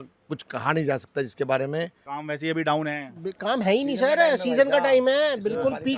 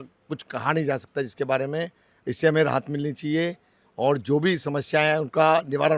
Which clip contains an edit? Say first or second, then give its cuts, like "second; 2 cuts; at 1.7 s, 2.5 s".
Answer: first; 1 cut; at 2.0 s